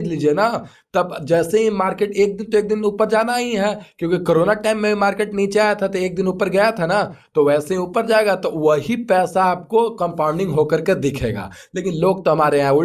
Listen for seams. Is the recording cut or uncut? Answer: uncut